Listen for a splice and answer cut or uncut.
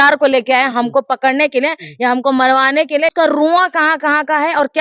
cut